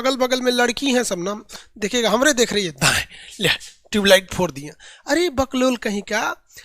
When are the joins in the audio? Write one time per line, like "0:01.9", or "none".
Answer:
0:01.4